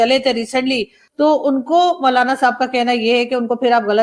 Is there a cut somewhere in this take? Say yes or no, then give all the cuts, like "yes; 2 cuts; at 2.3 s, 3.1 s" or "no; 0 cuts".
yes; 1 cut; at 1.0 s